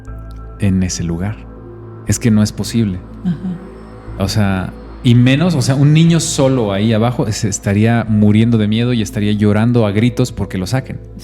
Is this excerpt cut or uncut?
uncut